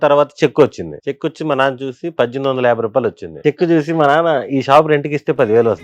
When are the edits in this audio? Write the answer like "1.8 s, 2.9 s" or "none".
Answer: 0.9 s, 3.4 s